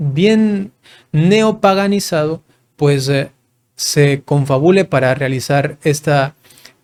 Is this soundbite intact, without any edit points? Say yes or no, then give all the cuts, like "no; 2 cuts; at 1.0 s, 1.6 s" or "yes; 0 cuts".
yes; 0 cuts